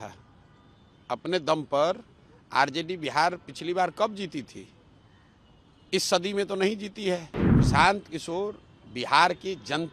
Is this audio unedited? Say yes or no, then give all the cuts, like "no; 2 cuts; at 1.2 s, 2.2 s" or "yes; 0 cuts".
no; 1 cut; at 7.4 s